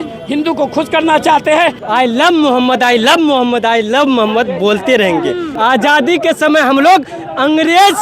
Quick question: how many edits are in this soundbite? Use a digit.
2